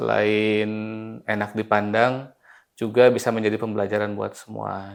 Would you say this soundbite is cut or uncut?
uncut